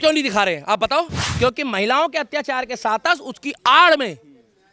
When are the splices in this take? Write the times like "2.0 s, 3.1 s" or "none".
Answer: 1.2 s